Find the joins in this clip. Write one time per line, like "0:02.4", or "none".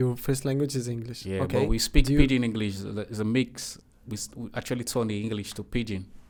none